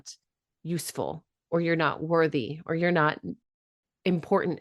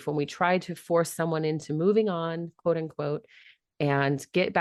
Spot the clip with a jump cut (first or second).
first